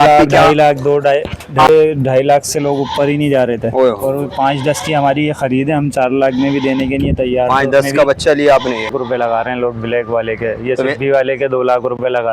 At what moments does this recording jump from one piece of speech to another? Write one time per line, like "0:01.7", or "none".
0:01.7
0:09.0

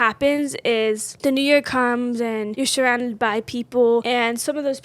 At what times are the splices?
0:01.1
0:02.5
0:04.0

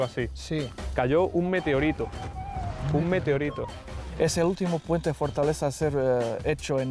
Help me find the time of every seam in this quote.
0:04.0

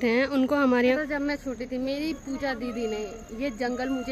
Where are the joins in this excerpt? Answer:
0:01.0

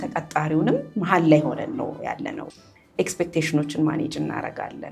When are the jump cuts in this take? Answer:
0:02.4

